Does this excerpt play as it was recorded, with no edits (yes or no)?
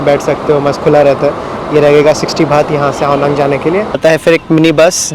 no